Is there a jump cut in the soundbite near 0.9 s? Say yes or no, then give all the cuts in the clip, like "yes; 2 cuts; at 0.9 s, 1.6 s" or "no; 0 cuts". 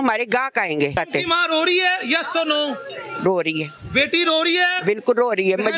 yes; 1 cut; at 0.9 s